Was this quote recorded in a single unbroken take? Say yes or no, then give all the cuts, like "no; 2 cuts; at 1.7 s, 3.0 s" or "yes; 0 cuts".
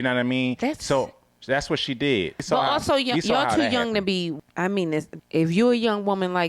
no; 3 cuts; at 2.5 s, 4.5 s, 5.2 s